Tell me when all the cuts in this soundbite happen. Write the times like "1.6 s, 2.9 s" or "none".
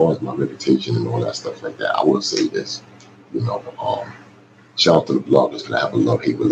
none